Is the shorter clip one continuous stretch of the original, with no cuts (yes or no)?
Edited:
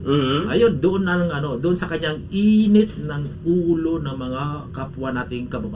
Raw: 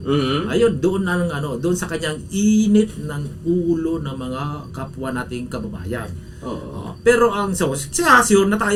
yes